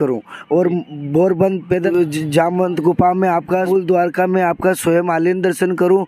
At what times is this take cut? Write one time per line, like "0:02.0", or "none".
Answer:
0:01.9
0:03.7